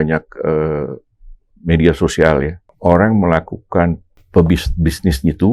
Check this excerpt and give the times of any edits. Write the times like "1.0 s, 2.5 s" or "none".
2.6 s, 4.1 s